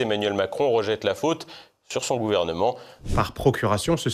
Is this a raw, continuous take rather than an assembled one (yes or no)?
no